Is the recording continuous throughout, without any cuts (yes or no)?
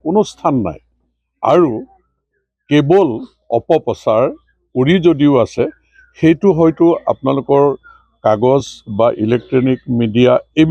yes